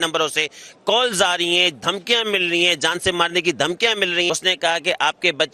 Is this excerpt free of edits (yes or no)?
no